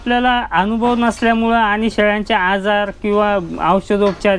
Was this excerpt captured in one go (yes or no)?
yes